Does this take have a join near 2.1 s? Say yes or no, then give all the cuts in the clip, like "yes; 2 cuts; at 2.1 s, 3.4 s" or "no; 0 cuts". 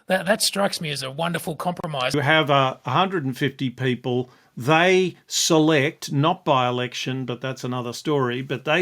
yes; 1 cut; at 2.1 s